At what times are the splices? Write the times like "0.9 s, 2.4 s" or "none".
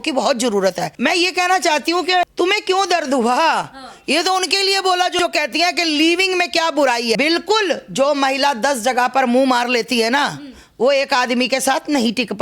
0.9 s, 2.3 s, 7.2 s